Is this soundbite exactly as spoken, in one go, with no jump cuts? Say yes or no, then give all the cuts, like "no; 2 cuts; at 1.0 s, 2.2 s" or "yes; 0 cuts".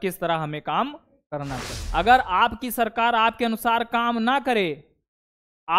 no; 1 cut; at 1.8 s